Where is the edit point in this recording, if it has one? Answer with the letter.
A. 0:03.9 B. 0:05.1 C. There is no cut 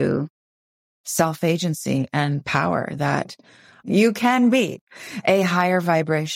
A